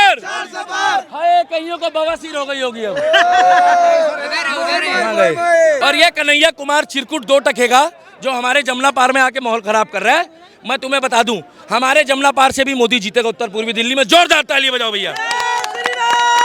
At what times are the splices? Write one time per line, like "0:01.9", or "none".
0:05.8